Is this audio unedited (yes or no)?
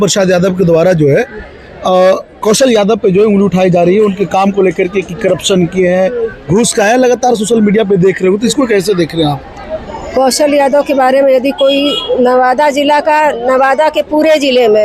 yes